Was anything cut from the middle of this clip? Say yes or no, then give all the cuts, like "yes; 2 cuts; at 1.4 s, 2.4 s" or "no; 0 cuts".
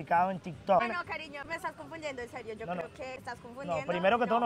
yes; 2 cuts; at 0.9 s, 3.2 s